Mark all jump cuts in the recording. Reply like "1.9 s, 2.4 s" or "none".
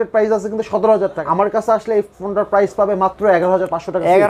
1.2 s

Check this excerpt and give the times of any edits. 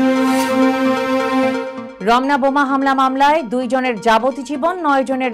1.8 s

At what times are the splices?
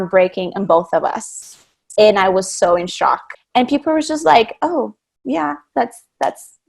3.3 s

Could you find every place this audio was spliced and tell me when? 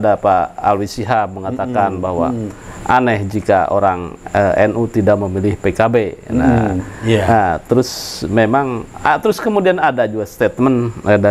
none

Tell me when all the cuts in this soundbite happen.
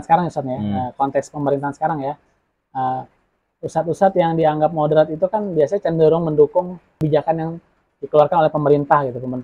6.9 s

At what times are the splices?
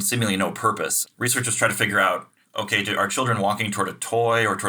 1.0 s, 2.4 s

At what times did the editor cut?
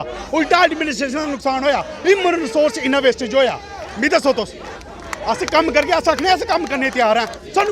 none

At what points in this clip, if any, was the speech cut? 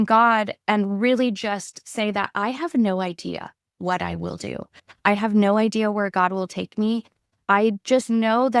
none

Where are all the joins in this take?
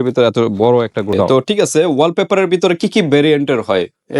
1.3 s

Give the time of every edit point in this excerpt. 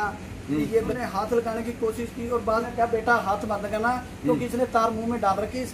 1.0 s, 2.6 s

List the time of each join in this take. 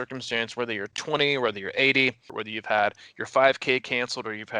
2.3 s

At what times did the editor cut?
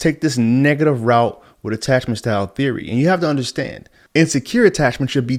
none

